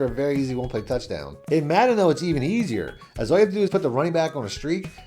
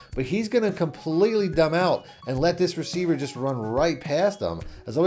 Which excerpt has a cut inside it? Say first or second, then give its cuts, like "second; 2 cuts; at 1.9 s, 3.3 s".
first; 1 cut; at 1.3 s